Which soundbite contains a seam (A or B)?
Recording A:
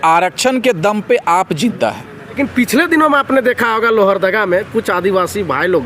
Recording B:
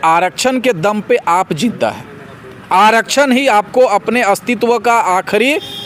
A